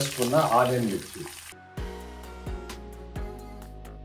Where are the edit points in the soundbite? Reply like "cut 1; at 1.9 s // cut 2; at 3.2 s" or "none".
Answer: cut 1; at 1.6 s